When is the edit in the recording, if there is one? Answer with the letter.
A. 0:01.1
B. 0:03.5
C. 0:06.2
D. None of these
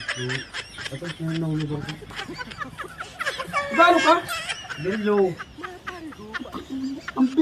D